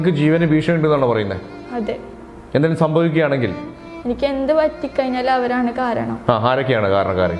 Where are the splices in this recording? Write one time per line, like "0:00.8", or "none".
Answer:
none